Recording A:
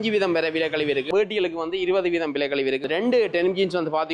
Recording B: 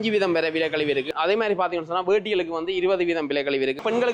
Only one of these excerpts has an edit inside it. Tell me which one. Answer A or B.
A